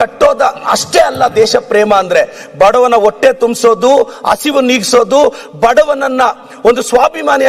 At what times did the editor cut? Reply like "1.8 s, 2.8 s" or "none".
none